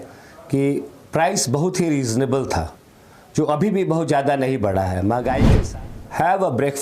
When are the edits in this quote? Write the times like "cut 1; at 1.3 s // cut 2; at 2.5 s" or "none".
cut 1; at 5.5 s